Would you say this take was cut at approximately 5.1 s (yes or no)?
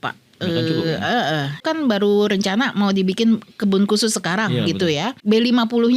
yes